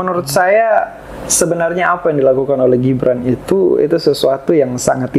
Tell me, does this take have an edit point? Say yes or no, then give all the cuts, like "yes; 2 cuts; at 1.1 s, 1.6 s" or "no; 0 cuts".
no; 0 cuts